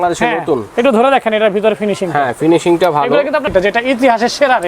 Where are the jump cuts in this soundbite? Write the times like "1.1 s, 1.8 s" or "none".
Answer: 3.3 s